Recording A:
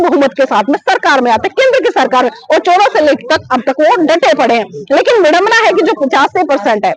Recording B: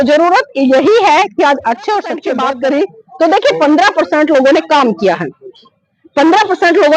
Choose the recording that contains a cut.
B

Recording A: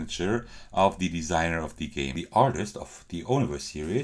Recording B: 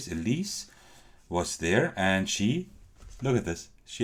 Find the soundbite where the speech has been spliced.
A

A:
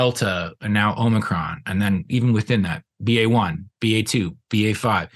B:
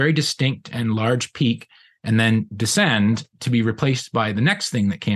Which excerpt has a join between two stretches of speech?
B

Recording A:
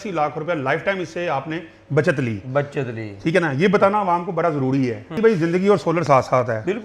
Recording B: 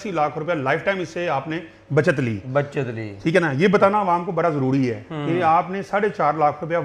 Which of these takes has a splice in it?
A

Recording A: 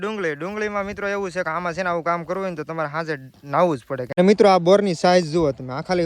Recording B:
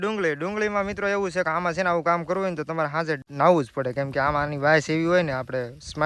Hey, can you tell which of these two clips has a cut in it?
A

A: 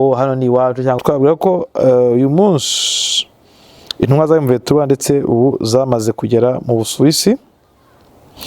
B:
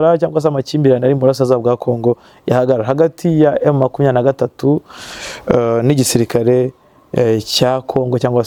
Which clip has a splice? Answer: A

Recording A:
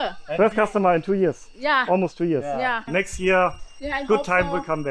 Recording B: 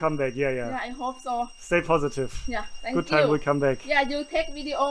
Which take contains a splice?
A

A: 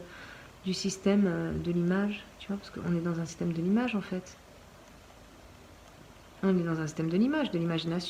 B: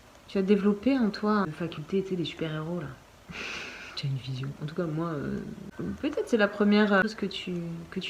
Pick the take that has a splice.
B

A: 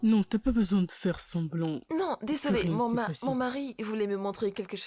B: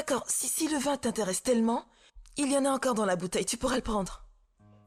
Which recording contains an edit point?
A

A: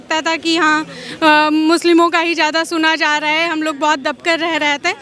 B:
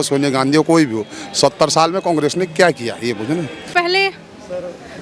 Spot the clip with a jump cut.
B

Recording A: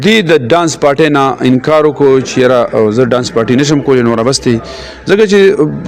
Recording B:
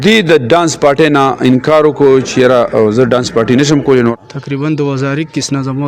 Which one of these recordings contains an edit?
B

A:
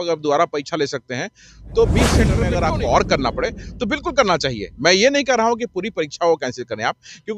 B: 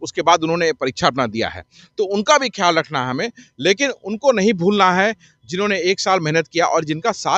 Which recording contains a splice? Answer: A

